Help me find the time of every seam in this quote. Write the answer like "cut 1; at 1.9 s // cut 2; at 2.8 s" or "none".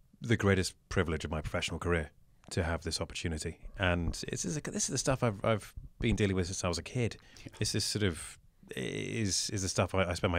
cut 1; at 3.7 s